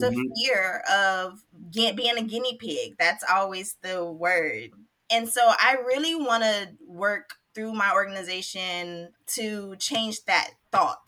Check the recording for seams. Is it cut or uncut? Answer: cut